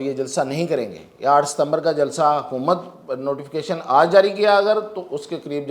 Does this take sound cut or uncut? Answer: uncut